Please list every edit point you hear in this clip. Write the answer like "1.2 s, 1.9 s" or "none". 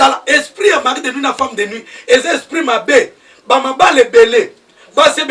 none

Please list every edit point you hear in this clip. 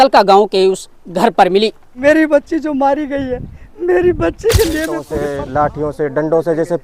1.9 s, 5.1 s

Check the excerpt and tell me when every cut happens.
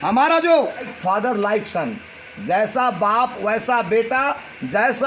0.9 s

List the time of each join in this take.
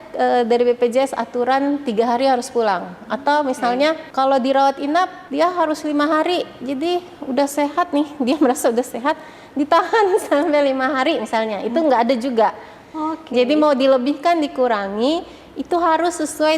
4.1 s, 5.2 s

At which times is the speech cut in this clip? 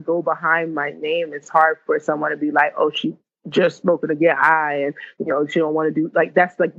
none

